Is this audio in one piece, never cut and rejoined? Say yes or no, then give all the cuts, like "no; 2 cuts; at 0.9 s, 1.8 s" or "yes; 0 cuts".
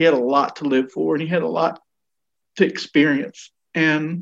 yes; 0 cuts